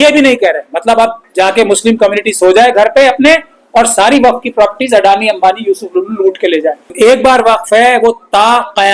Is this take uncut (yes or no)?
no